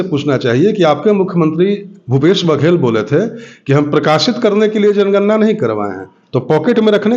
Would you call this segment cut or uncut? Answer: uncut